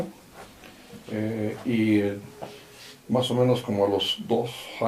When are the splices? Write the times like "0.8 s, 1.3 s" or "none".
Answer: none